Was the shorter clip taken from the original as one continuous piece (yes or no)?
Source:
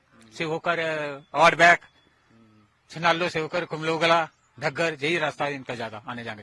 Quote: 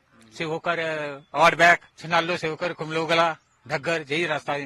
no